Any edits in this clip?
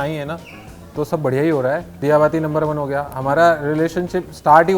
yes; 1 cut; at 2.0 s

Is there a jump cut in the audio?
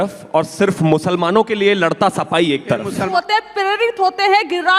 yes; 1 cut; at 3.1 s

